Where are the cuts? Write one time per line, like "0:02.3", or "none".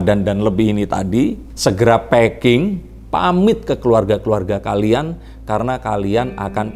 none